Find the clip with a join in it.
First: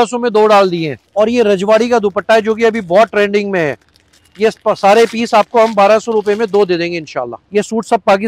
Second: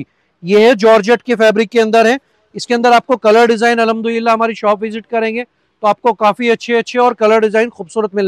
first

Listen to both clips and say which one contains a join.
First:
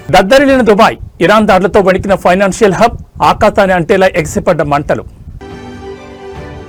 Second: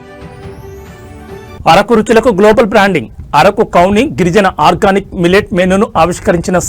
second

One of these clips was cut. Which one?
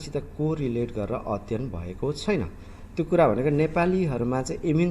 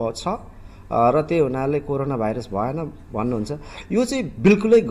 first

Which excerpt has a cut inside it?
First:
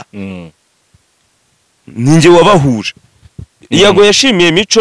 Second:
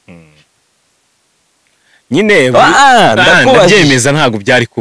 first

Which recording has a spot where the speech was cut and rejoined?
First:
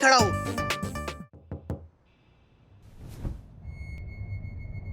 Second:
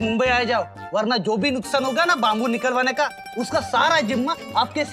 first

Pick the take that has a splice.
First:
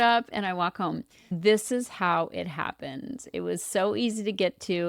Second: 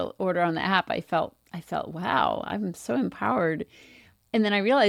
first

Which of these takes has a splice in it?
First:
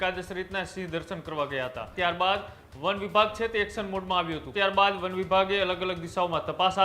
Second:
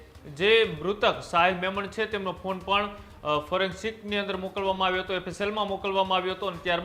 first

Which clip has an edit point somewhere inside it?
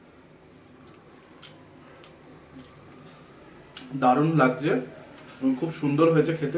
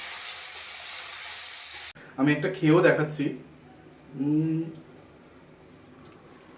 second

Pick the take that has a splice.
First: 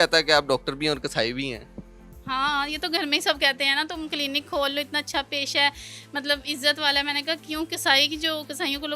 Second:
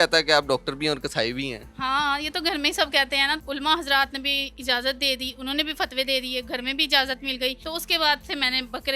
second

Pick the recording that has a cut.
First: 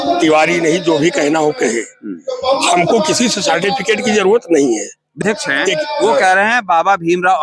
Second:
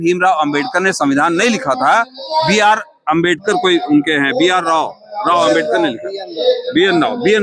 first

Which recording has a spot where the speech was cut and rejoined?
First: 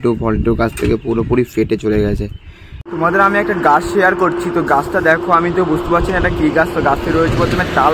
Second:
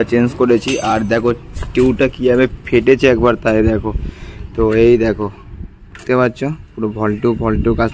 first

